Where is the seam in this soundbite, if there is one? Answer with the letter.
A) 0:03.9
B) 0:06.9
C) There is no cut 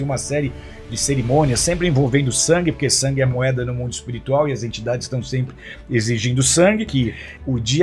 B